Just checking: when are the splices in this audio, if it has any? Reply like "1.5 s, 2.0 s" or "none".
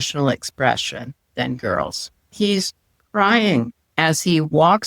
2.1 s, 3.8 s